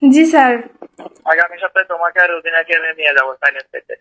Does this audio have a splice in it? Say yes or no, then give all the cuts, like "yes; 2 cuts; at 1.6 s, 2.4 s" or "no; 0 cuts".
yes; 1 cut; at 1.2 s